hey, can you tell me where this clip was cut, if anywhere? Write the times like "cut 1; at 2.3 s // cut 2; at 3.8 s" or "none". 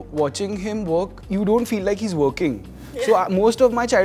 cut 1; at 1.2 s

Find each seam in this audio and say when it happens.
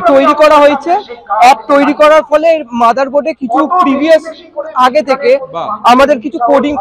none

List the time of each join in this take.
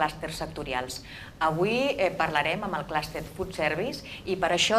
cut 1; at 3.5 s

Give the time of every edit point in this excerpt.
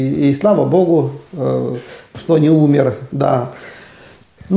none

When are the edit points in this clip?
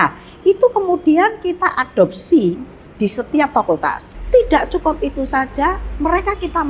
cut 1; at 4.1 s

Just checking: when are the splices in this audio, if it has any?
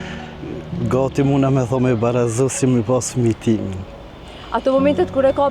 none

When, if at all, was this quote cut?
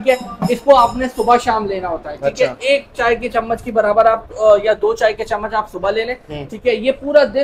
none

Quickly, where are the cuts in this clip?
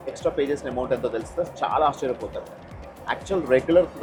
none

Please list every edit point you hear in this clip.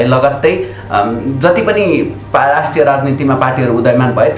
none

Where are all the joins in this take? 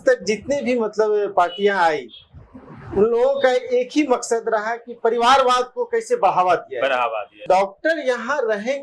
cut 1; at 7.4 s

